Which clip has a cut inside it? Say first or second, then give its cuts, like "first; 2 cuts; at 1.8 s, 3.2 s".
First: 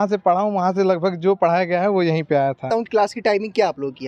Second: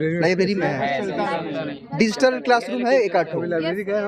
first; 1 cut; at 2.7 s